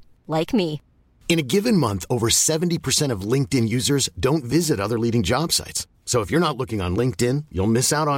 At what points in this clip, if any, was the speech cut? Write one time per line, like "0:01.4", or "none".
none